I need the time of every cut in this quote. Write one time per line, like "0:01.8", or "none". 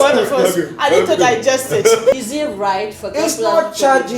0:02.1